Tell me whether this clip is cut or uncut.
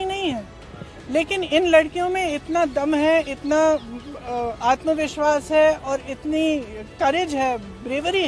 uncut